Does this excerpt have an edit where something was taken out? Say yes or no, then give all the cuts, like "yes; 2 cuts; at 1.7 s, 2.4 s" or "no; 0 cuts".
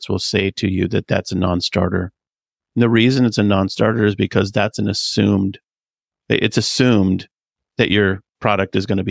no; 0 cuts